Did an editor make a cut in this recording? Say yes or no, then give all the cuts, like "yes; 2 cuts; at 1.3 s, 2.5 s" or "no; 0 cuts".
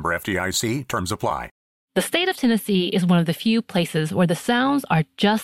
yes; 1 cut; at 1.6 s